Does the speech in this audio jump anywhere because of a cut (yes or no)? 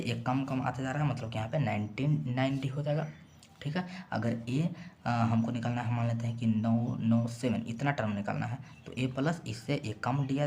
no